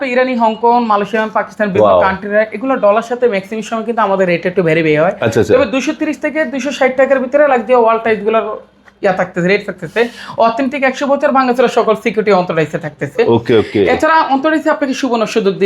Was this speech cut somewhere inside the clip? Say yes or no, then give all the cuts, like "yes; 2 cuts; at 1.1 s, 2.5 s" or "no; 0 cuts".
no; 0 cuts